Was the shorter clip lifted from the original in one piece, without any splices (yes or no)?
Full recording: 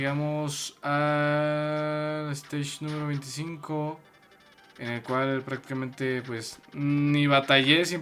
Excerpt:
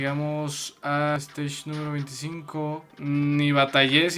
no